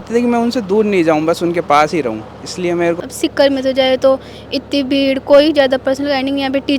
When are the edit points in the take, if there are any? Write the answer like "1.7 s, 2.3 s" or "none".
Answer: 3.0 s